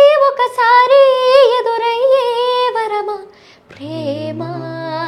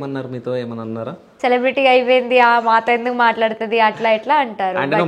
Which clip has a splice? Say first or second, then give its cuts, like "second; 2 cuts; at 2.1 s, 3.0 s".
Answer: second; 1 cut; at 1.3 s